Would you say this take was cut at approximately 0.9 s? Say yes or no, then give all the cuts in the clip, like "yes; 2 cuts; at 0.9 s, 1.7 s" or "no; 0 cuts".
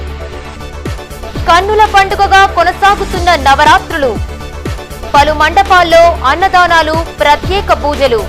yes; 1 cut; at 0.9 s